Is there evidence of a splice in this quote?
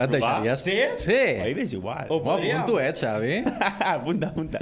no; 0 cuts

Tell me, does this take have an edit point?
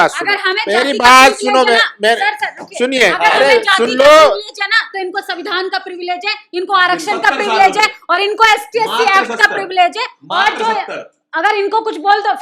no; 0 cuts

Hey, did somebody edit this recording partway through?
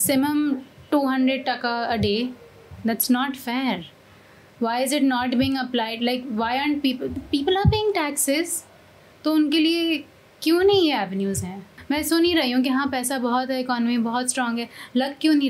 yes; 1 cut; at 11.7 s

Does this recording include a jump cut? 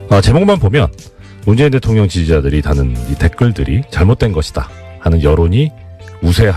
yes; 1 cut; at 4.8 s

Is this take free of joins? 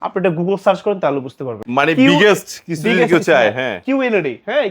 no; 1 cut; at 1.6 s

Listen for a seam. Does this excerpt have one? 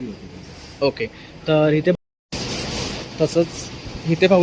yes; 1 cut; at 1.9 s

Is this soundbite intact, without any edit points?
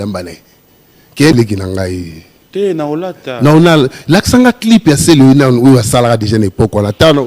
no; 1 cut; at 1.3 s

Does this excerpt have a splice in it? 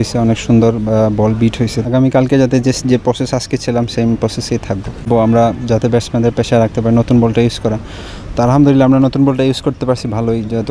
yes; 2 cuts; at 1.8 s, 4.9 s

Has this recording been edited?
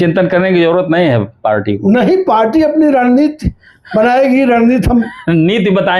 no; 0 cuts

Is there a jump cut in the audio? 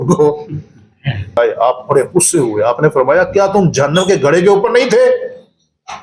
yes; 1 cut; at 1.4 s

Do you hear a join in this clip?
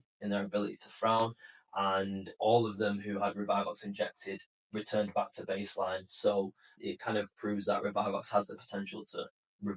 yes; 1 cut; at 6.7 s

